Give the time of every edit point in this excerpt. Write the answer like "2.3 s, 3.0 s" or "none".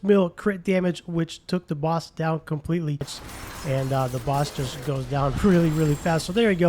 3.2 s